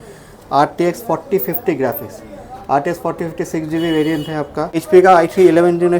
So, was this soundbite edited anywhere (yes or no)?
yes